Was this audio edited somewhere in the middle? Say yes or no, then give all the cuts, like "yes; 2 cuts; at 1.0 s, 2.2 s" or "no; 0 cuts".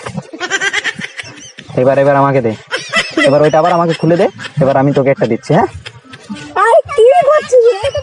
no; 0 cuts